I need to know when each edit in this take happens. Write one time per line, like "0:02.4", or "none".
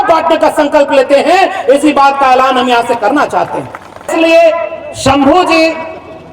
0:04.1